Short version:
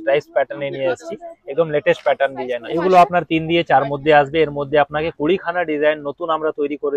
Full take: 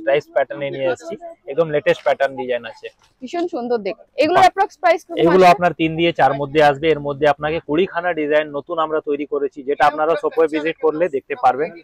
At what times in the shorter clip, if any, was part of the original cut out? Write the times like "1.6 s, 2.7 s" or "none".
2.6 s